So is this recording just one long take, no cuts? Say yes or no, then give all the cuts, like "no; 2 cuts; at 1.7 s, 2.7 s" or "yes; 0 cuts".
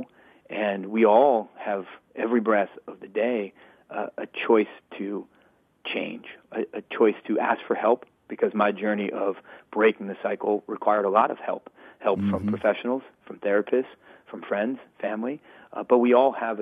yes; 0 cuts